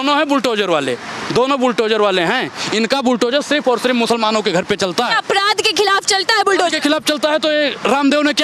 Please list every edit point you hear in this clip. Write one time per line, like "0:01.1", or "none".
none